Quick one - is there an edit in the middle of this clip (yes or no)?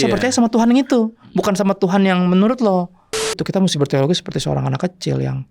yes